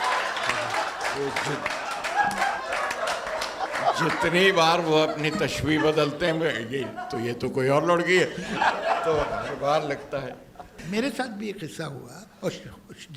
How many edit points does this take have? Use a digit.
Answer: 1